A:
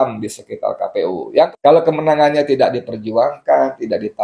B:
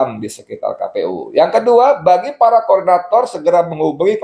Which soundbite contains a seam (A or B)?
A